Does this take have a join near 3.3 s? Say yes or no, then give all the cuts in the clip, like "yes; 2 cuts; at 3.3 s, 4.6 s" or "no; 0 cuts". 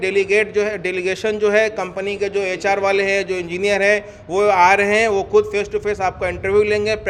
no; 0 cuts